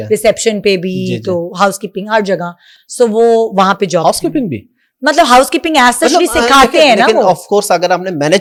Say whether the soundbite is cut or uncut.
uncut